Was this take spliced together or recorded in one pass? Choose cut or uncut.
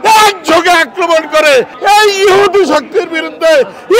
cut